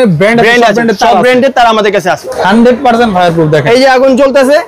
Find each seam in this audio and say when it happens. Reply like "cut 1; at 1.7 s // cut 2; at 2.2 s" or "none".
cut 1; at 2.3 s